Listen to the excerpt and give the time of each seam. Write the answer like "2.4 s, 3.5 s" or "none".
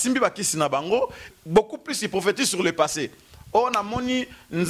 1.2 s